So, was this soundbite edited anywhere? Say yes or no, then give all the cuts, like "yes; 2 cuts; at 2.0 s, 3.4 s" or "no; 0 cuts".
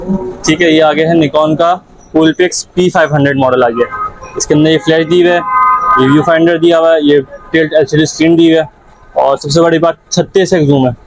no; 0 cuts